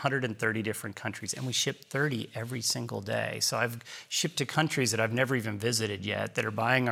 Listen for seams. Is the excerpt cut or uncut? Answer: uncut